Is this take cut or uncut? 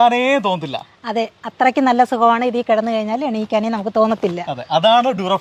uncut